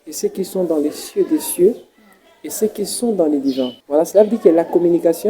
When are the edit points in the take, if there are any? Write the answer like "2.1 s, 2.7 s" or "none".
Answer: 3.8 s